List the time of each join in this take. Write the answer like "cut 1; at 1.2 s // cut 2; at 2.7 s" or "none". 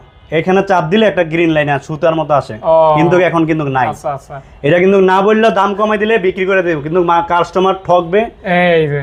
none